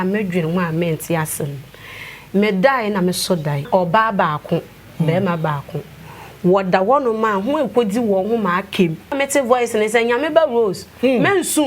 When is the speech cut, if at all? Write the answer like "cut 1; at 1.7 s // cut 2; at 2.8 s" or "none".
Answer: cut 1; at 3.6 s // cut 2; at 9.1 s